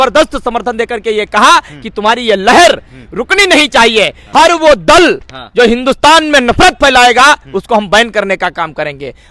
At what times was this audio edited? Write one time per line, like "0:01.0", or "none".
0:04.2